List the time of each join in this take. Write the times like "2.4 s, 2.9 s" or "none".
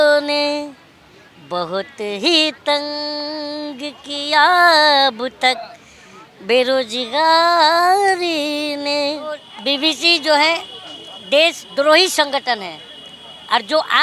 9.5 s